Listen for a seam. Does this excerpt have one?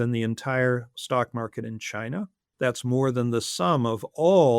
yes; 1 cut; at 2.4 s

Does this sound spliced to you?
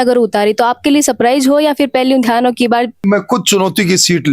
yes; 1 cut; at 3.0 s

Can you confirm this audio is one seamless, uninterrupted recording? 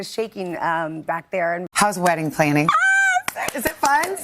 no; 1 cut; at 1.7 s

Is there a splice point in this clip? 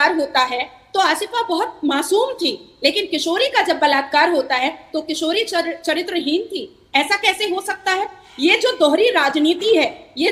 no; 0 cuts

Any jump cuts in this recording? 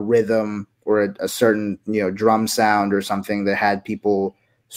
no; 0 cuts

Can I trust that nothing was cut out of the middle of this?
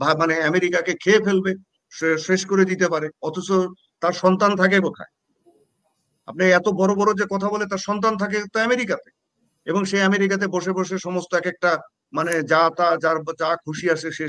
yes; 0 cuts

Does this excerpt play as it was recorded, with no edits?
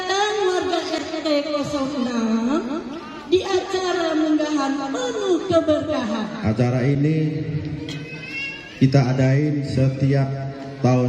no; 1 cut; at 6.3 s

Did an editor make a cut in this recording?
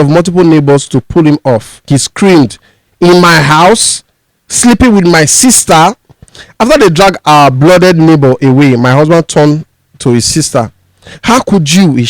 yes; 1 cut; at 1.8 s

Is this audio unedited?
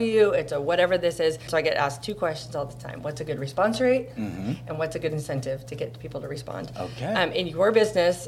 no; 1 cut; at 1.4 s

